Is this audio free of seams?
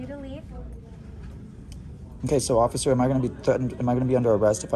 yes; 0 cuts

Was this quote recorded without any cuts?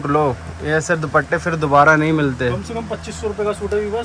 yes; 0 cuts

